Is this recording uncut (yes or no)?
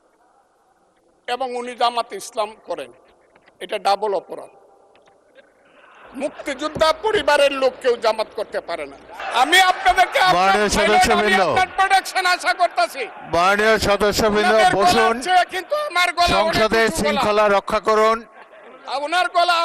no